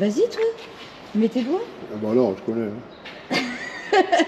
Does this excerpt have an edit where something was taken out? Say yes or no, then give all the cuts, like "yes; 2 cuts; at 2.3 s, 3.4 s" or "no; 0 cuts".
no; 0 cuts